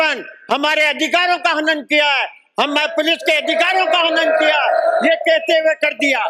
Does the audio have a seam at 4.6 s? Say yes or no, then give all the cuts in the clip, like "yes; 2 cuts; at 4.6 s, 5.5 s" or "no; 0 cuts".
no; 0 cuts